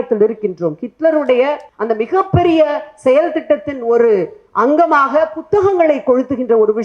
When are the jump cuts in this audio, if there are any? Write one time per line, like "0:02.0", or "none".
0:01.7